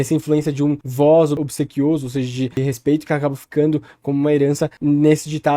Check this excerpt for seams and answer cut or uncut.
cut